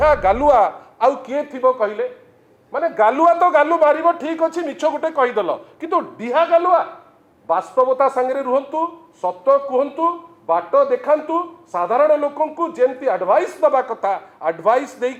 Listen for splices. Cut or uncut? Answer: uncut